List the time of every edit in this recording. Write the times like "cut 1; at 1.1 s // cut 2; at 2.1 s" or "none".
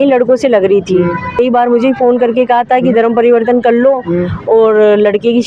cut 1; at 1.3 s